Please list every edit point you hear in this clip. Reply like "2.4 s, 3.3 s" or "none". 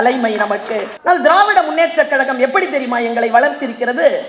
0.9 s